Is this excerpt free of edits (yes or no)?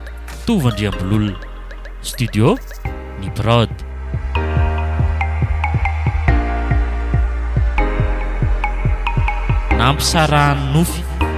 yes